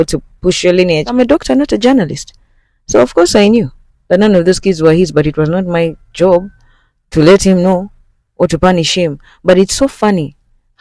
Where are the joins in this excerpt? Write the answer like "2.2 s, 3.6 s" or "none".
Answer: 1.1 s